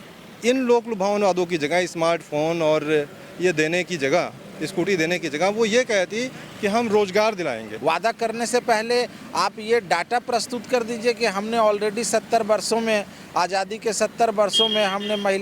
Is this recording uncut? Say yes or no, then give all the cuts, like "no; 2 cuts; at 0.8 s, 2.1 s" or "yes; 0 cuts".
no; 1 cut; at 7.7 s